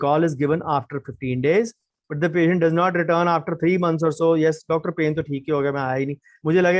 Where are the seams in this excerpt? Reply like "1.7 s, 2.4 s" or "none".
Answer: none